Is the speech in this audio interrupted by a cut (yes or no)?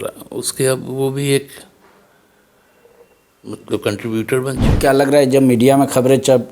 yes